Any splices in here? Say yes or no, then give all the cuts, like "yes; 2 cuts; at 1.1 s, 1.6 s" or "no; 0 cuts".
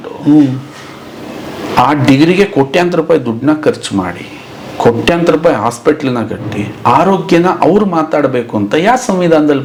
no; 0 cuts